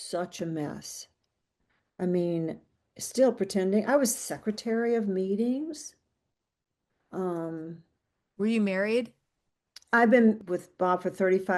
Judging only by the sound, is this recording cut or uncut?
cut